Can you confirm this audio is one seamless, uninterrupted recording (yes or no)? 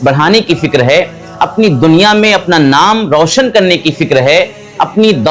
yes